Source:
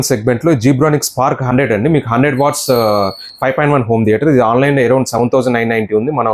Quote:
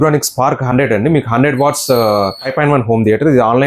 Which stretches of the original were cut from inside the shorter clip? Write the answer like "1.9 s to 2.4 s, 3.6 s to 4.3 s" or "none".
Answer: 3.2 s to 3.4 s